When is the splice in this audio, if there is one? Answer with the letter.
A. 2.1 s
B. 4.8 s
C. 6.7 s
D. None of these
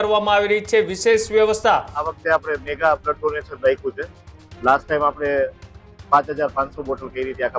A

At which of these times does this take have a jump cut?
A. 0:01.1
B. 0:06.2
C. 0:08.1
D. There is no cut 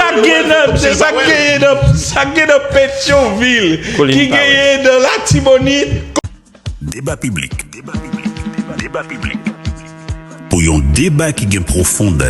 B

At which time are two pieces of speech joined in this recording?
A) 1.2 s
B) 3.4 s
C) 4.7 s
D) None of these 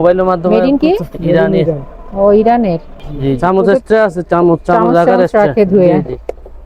B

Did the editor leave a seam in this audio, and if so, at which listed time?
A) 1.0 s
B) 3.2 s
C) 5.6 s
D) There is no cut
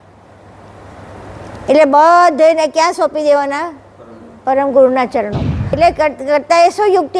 C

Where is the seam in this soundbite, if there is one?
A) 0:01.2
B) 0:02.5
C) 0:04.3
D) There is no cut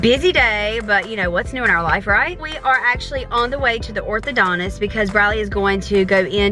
B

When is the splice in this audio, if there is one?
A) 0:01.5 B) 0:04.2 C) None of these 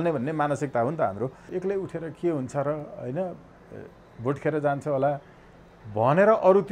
A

